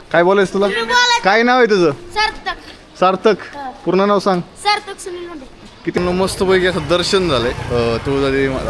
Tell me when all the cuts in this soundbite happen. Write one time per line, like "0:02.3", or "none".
0:06.0